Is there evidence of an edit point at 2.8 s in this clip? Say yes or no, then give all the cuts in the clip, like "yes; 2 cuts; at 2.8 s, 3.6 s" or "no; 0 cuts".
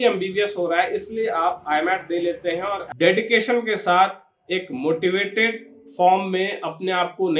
yes; 1 cut; at 2.8 s